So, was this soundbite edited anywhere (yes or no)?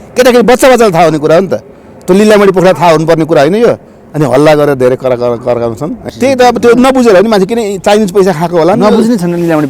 yes